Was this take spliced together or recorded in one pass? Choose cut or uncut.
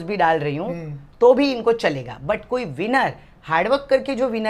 uncut